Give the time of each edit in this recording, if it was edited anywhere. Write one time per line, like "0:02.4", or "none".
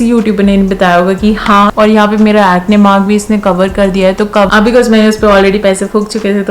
0:01.7
0:04.5